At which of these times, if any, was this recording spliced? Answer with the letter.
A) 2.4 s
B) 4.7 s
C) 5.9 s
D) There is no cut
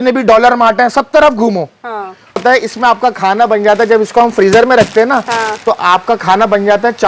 A